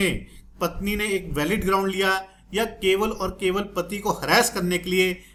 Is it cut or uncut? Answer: uncut